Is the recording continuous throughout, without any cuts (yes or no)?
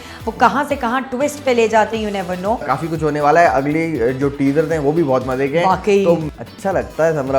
no